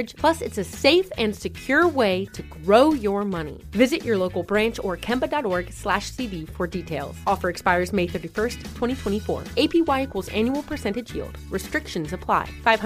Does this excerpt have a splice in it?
no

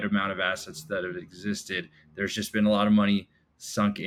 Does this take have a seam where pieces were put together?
no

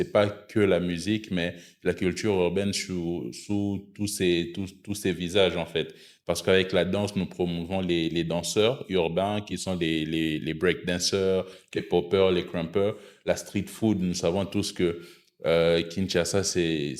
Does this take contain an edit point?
no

